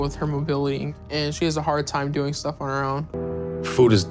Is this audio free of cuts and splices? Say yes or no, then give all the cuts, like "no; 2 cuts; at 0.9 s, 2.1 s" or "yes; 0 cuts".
no; 1 cut; at 3.2 s